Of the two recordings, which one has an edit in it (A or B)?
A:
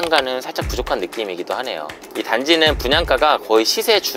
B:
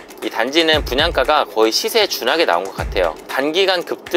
B